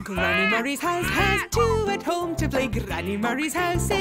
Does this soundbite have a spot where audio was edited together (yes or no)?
no